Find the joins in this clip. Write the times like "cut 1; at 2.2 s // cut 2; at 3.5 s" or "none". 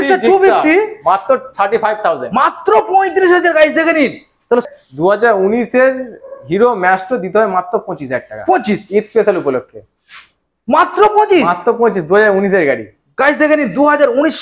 cut 1; at 4.6 s